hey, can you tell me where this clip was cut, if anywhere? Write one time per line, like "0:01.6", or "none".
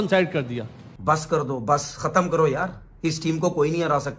0:01.0